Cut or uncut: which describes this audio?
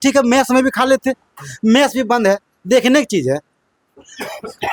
uncut